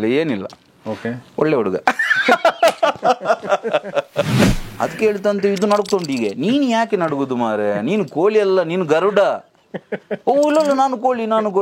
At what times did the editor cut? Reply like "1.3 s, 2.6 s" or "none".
4.6 s